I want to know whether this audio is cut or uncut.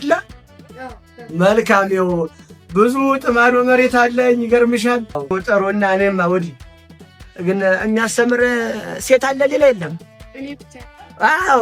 cut